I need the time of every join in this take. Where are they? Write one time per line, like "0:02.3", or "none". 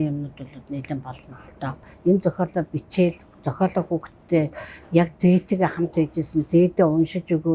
0:01.8